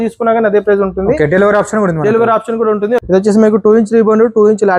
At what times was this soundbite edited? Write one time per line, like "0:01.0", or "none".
0:03.0